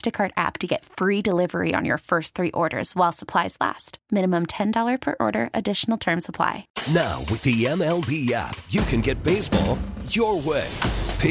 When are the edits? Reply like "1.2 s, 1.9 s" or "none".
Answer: 6.7 s